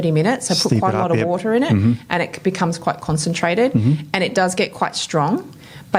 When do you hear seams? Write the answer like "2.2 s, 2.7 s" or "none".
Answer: none